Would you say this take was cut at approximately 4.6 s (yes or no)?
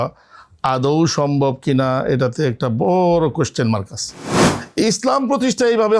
yes